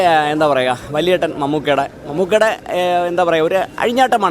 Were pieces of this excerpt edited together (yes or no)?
no